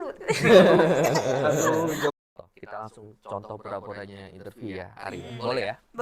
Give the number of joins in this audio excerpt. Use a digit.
1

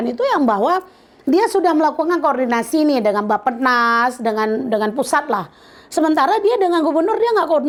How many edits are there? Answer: 0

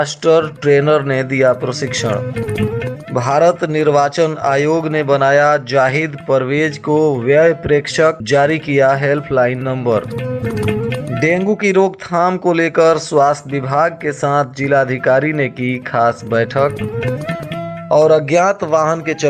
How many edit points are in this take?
0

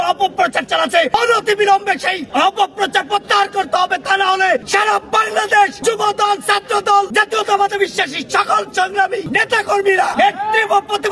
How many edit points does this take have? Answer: 7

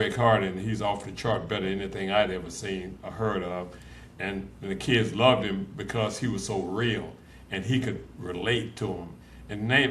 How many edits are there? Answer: 0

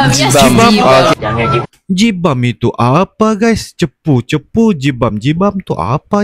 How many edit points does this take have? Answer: 0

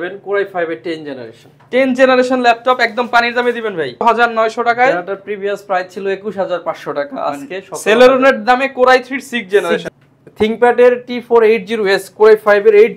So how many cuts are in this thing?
2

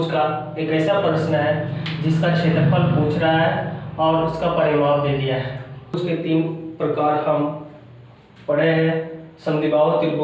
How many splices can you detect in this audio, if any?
1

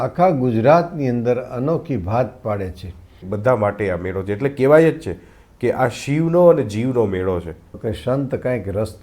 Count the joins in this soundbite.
2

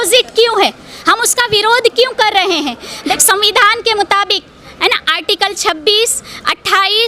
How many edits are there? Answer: 1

